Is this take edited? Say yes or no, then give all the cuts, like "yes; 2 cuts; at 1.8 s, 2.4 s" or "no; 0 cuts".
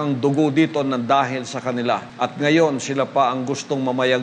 yes; 1 cut; at 2.1 s